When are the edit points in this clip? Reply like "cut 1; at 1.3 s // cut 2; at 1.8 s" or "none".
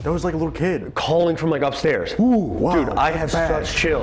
none